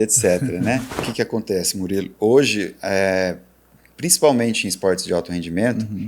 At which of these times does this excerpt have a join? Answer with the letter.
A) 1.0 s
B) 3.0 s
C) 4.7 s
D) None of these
A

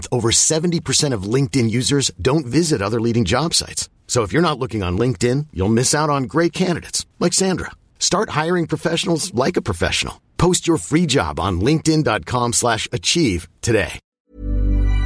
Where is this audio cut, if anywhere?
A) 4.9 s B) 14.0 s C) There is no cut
B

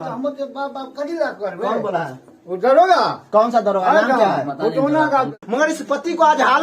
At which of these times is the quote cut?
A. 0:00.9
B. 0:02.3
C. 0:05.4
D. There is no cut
C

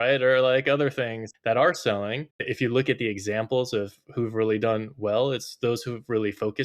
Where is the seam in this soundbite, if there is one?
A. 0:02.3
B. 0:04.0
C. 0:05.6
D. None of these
A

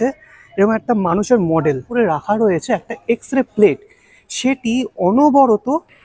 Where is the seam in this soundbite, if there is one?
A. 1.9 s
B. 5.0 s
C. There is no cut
A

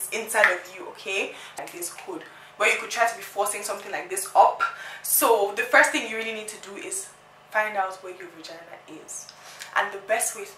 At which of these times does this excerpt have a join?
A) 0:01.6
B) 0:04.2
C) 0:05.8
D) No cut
A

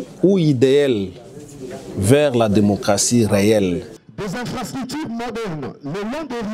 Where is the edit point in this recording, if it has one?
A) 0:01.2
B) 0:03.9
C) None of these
B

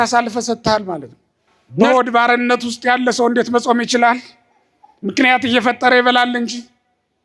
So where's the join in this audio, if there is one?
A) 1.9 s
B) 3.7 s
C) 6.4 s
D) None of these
A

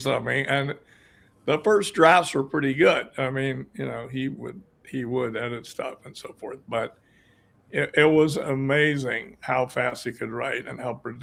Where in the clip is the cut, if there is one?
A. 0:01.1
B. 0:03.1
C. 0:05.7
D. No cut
D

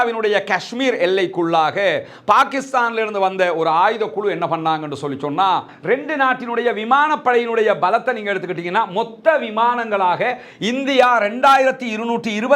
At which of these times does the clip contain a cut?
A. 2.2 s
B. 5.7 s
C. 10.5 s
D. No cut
B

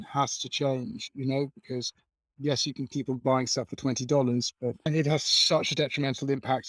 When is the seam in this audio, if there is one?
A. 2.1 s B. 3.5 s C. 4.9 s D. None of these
C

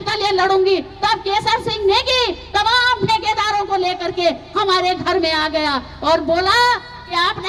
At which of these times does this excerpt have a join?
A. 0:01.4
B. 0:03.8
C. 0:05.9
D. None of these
D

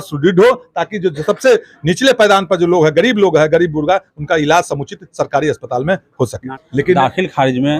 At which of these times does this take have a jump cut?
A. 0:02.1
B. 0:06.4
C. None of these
B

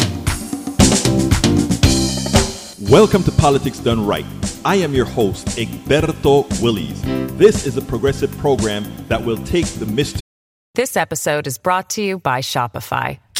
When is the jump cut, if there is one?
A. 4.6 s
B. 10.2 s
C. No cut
B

